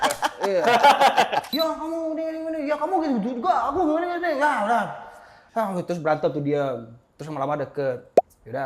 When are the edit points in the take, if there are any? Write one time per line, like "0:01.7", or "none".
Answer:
0:01.5